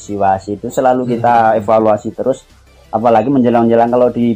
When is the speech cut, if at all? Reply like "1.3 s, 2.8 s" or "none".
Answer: none